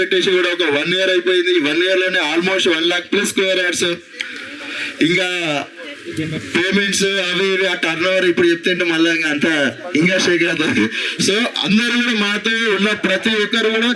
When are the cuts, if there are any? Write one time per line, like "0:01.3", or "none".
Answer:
none